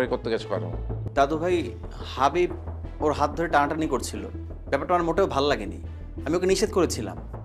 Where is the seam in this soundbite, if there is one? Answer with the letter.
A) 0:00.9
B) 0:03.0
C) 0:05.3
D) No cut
A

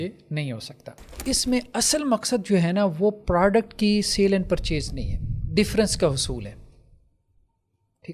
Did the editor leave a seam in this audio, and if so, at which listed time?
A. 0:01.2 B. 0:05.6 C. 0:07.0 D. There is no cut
A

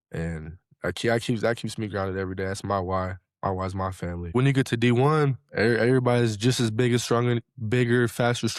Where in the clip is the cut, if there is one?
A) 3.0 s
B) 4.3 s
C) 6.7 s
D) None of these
B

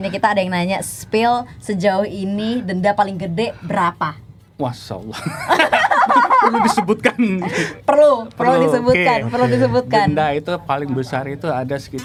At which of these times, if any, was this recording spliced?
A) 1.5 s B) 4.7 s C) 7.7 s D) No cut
D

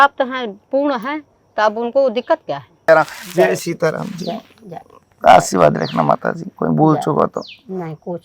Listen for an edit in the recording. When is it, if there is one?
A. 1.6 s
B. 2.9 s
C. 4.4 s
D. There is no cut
B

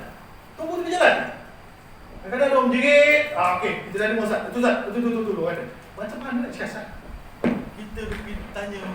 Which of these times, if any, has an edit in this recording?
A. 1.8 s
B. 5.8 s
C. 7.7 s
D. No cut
D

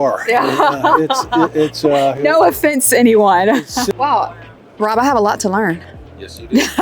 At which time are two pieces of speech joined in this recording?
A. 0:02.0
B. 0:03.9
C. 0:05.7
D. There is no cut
B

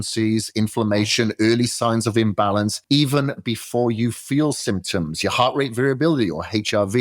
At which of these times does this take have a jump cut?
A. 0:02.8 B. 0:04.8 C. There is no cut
A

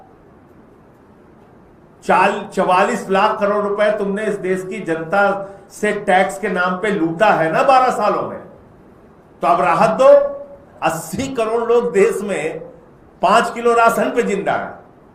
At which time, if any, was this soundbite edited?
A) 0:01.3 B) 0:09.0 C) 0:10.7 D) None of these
C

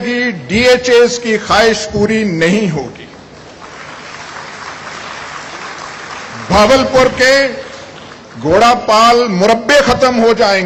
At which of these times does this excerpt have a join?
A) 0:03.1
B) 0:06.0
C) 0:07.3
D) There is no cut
D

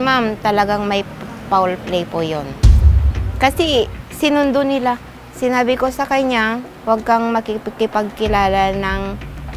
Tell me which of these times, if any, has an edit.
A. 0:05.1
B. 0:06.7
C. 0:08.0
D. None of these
B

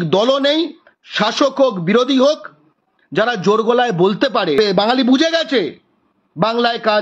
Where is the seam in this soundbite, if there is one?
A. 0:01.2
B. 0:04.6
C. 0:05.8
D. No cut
B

